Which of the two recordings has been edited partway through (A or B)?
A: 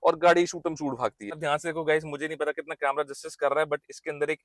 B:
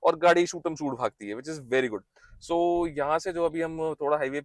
A